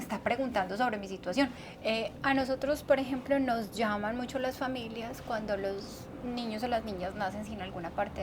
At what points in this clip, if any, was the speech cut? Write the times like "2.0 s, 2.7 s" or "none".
1.6 s